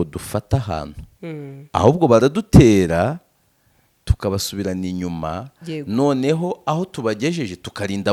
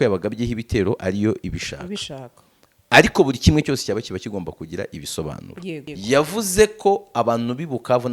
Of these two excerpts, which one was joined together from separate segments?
second; 1 cut; at 5.9 s

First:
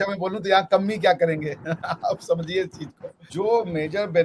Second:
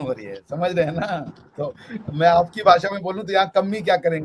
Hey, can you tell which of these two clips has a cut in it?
first; 1 cut; at 3.1 s

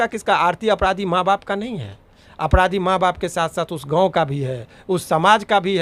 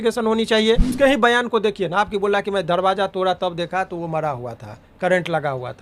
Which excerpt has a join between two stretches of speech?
second; 1 cut; at 0.9 s

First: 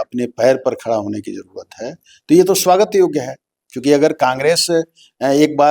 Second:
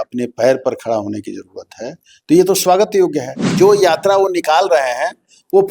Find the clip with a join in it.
second; 1 cut; at 3.5 s

